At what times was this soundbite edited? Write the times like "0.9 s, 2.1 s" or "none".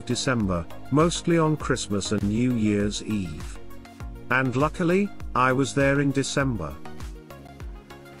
6.8 s